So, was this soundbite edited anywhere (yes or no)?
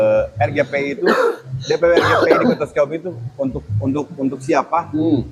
no